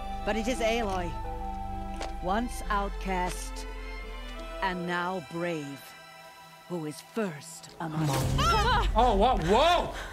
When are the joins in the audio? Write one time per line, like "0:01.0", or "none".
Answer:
none